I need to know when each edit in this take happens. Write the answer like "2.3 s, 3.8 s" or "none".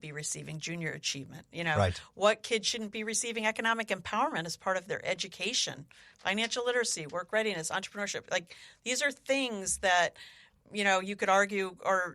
none